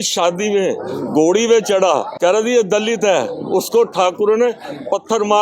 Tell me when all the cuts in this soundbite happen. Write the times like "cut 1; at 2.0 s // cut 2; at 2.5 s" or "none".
cut 1; at 2.1 s